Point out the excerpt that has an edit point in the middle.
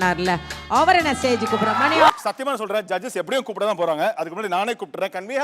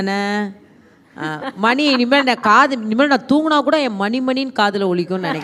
first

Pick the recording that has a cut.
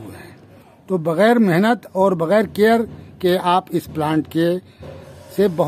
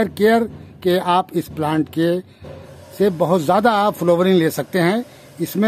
first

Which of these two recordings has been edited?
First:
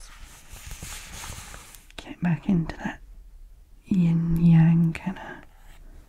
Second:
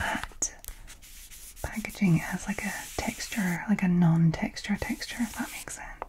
first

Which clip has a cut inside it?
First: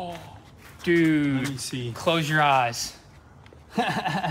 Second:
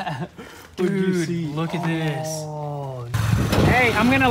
second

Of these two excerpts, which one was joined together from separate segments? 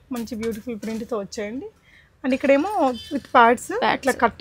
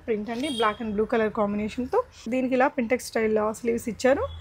second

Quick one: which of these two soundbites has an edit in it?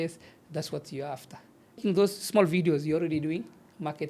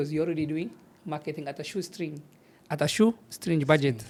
first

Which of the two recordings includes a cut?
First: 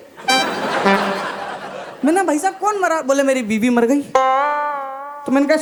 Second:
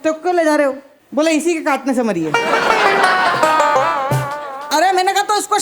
second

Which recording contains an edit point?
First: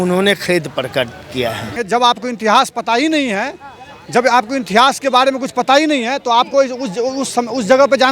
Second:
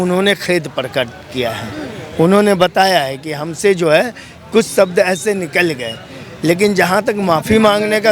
first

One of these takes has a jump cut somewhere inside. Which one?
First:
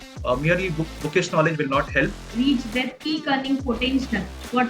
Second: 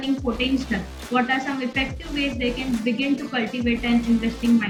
first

